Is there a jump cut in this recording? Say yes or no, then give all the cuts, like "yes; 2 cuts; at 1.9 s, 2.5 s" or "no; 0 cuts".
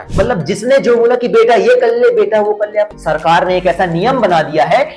yes; 1 cut; at 2.9 s